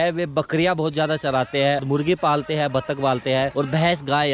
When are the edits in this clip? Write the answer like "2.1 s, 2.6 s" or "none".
1.8 s, 3.5 s